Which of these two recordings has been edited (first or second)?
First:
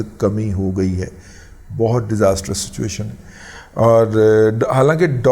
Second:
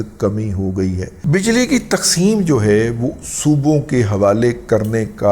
second